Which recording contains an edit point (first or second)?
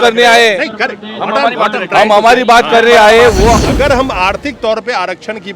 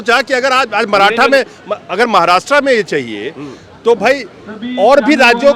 first